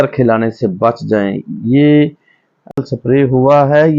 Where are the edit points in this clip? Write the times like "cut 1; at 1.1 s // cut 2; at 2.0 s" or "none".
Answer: cut 1; at 2.8 s